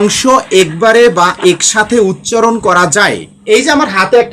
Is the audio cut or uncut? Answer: cut